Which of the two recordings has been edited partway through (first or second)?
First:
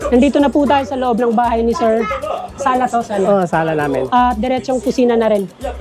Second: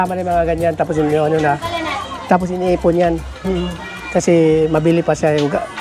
first